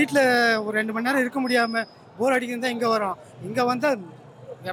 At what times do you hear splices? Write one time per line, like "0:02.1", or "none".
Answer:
none